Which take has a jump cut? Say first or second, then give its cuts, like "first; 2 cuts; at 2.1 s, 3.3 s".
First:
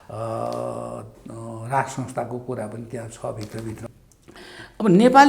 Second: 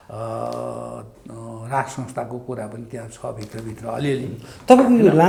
first; 1 cut; at 3.8 s